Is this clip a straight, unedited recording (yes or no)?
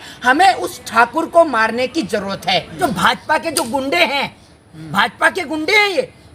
no